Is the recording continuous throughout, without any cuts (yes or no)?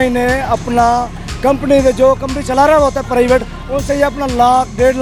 yes